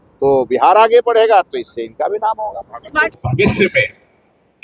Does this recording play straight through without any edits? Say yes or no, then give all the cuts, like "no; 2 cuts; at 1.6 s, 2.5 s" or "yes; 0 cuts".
no; 1 cut; at 3.1 s